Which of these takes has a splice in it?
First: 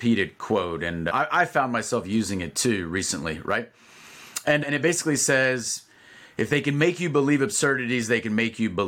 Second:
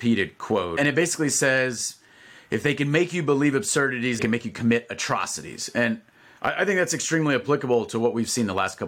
second; 2 cuts; at 0.8 s, 4.2 s

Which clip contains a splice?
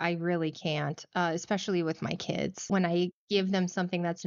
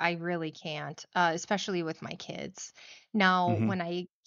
first; 1 cut; at 2.7 s

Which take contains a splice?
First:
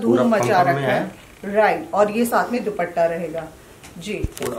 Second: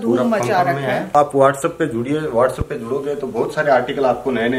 second; 1 cut; at 1.1 s

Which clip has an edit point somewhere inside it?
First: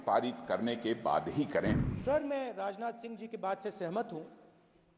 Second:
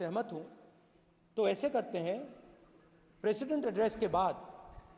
first; 1 cut; at 1.9 s

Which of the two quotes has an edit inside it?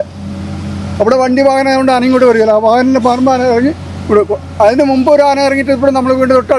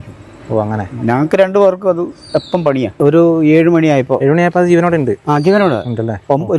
second; 1 cut; at 2.9 s

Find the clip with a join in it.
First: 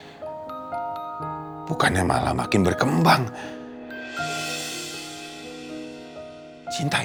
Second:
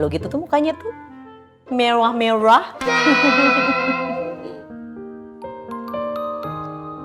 second; 1 cut; at 4.4 s

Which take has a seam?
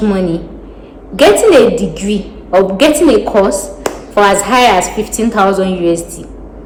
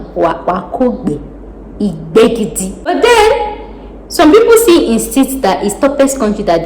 second; 1 cut; at 2.9 s

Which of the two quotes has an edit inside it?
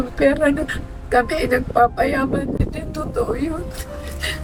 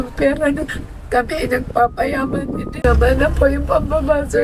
second; 1 cut; at 2.7 s

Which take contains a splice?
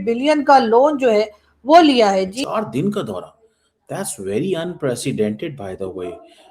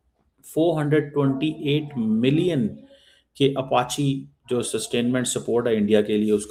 first; 1 cut; at 2.4 s

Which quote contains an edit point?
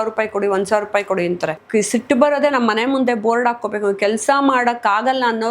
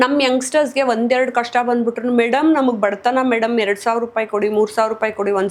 first; 1 cut; at 1.6 s

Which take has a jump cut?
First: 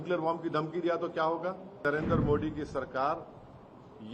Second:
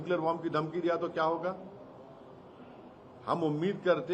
first; 1 cut; at 1.8 s

